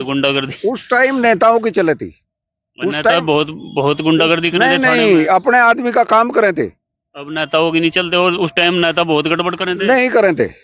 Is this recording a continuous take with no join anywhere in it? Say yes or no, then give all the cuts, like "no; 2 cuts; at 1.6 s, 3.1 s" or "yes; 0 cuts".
yes; 0 cuts